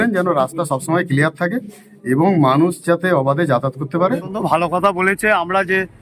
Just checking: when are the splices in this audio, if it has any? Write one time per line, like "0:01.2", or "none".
0:04.3